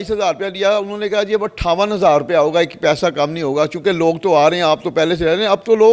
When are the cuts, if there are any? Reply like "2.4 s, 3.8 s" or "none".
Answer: none